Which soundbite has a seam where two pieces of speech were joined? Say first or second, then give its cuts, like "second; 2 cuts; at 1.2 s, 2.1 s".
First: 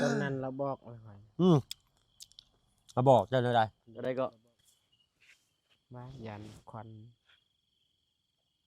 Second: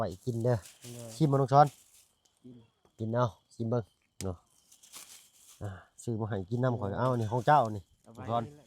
first; 1 cut; at 3.8 s